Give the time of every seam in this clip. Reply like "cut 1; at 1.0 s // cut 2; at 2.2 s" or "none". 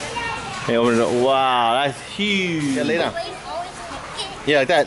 cut 1; at 2.8 s